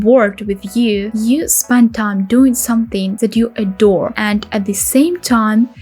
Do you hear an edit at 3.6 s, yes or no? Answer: no